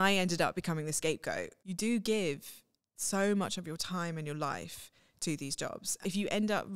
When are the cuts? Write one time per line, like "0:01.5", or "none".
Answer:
0:01.6
0:06.0